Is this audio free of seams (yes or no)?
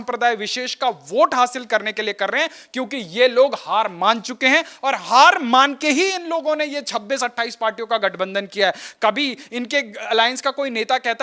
yes